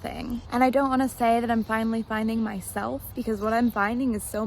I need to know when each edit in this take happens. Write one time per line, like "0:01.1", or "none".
0:03.1